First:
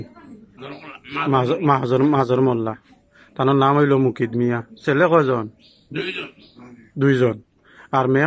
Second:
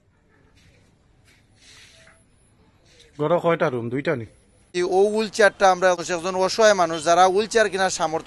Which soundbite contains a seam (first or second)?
second